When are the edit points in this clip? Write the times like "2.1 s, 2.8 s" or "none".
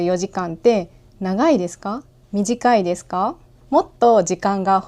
2.1 s, 3.5 s